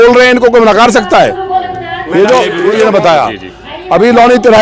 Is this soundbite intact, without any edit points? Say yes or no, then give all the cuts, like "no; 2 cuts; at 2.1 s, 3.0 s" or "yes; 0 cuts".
no; 1 cut; at 2.6 s